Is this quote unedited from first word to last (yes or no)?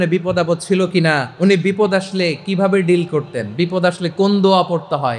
no